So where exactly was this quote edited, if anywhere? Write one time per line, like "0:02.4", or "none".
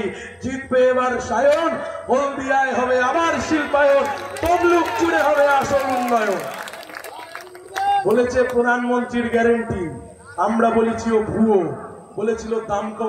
0:01.0